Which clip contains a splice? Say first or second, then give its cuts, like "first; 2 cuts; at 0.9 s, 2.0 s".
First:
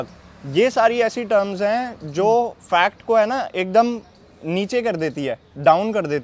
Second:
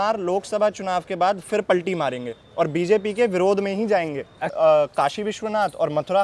second; 1 cut; at 4.5 s